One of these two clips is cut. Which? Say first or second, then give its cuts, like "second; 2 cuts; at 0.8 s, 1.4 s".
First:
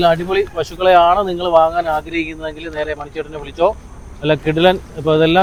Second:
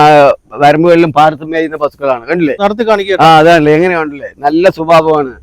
second; 1 cut; at 2.6 s